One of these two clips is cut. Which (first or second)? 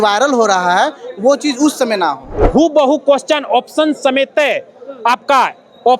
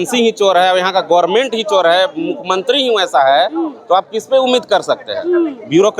first